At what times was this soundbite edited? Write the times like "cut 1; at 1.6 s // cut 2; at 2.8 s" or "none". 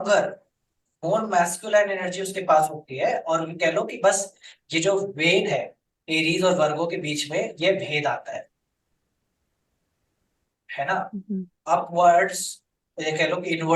none